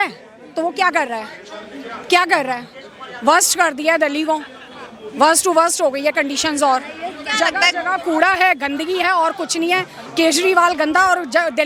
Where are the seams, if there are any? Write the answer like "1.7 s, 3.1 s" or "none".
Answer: none